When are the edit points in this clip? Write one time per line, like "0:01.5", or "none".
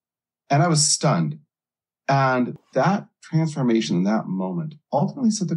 0:02.5